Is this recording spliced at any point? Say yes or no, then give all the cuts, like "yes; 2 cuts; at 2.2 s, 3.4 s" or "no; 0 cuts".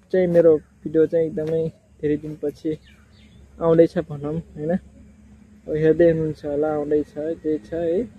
no; 0 cuts